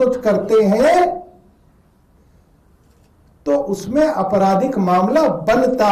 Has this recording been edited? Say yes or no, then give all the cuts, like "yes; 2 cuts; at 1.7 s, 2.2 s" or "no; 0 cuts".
no; 0 cuts